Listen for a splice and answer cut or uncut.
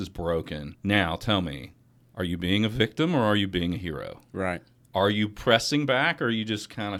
uncut